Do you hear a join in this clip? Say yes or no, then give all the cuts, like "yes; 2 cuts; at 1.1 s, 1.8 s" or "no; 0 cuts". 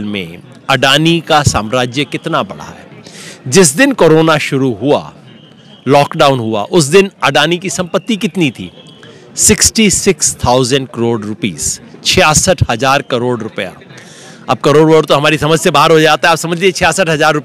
no; 0 cuts